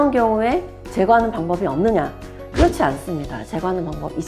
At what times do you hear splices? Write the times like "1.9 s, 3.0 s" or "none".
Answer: none